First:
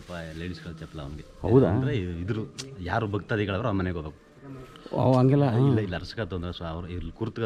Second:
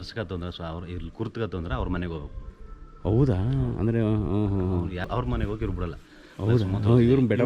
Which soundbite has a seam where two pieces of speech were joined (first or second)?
second